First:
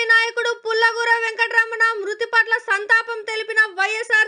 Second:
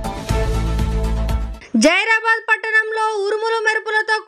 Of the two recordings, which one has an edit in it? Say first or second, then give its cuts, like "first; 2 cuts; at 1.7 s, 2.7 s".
second; 1 cut; at 1.5 s